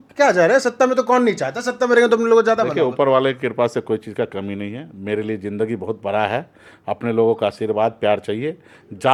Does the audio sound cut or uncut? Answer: uncut